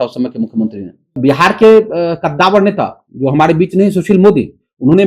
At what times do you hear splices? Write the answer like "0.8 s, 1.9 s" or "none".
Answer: 1.2 s